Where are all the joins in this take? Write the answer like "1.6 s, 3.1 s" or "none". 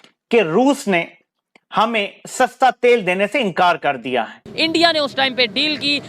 4.5 s

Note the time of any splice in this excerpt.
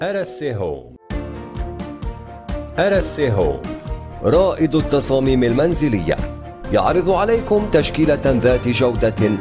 0.9 s

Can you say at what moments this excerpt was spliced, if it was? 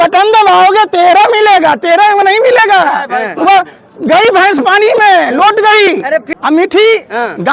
6.3 s

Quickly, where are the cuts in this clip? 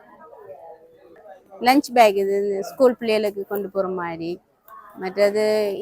1.1 s

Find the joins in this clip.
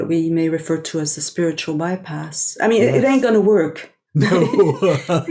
3.2 s

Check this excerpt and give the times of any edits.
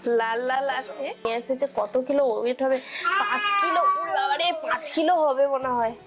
1.3 s

